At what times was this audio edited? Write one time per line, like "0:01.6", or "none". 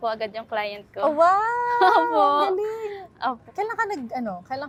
none